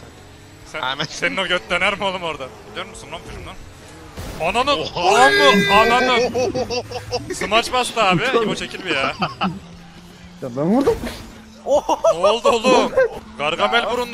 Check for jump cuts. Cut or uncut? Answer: cut